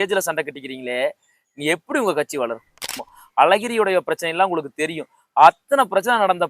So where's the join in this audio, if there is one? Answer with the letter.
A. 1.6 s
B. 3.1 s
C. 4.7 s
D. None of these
B